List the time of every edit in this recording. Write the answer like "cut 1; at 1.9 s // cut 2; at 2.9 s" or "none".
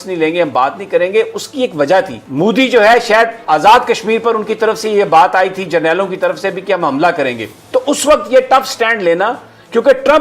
cut 1; at 2.2 s